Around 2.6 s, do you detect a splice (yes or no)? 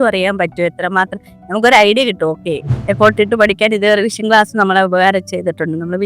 yes